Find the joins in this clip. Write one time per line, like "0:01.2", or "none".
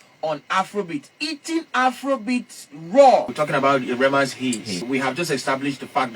0:03.4
0:04.9